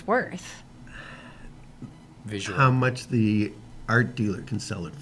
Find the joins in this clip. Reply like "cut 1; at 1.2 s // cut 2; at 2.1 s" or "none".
none